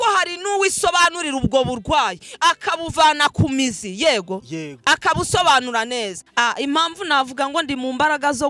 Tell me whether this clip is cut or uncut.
cut